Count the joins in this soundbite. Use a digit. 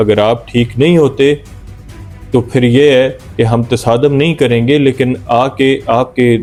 0